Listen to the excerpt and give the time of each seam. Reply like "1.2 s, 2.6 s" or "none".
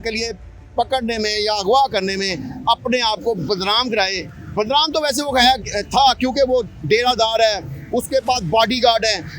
none